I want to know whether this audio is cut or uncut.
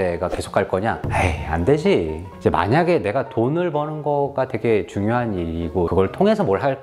cut